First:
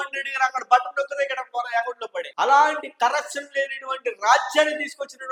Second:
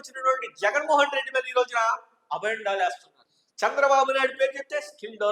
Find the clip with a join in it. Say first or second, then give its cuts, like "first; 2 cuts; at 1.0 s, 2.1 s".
second; 1 cut; at 3.1 s